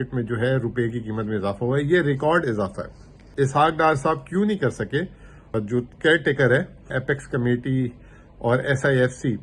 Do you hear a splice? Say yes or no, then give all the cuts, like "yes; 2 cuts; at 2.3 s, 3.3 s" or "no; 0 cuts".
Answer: yes; 3 cuts; at 3.2 s, 5.4 s, 6.9 s